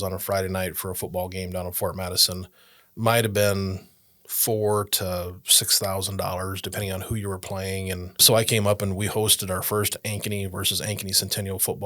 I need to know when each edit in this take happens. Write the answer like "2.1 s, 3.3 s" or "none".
8.2 s